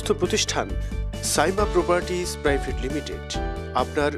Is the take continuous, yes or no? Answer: yes